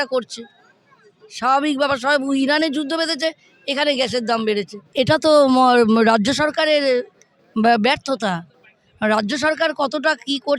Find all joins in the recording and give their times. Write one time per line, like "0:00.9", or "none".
0:04.9

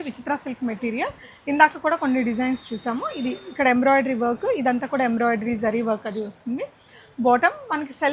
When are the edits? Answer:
none

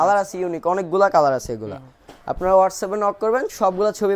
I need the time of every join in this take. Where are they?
none

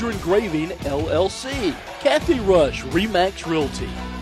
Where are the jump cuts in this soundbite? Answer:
0:01.9

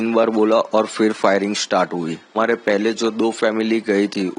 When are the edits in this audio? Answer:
0:02.3

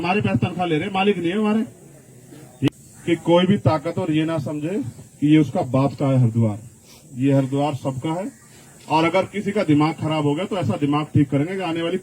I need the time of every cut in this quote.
0:02.7

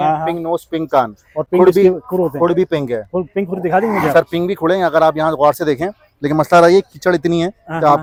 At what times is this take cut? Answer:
none

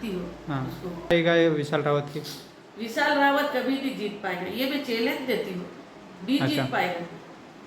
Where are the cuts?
0:01.1

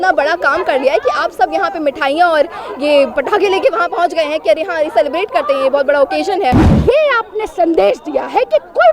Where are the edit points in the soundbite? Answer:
0:06.7

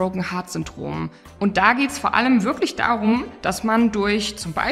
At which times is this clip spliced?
0:01.2

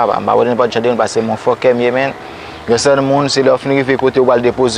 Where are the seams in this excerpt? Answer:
none

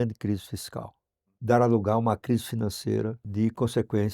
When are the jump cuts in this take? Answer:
0:01.1
0:03.2

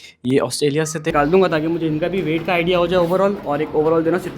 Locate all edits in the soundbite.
0:01.1

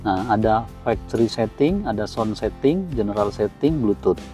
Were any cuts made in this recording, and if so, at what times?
none

